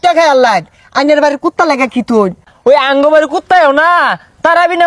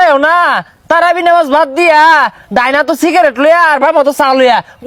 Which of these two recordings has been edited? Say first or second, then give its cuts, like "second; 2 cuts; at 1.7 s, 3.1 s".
first; 1 cut; at 2.5 s